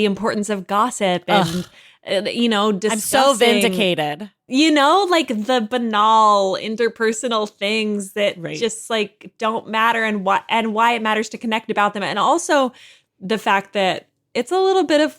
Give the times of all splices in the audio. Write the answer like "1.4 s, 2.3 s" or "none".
14.2 s